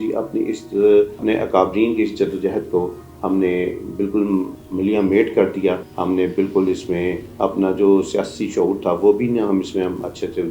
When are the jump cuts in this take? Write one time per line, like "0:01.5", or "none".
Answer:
0:01.2
0:04.6
0:05.9